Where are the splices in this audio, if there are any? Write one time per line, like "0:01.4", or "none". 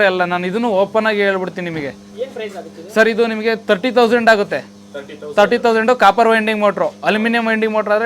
none